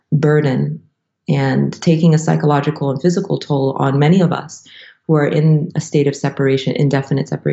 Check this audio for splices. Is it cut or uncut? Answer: cut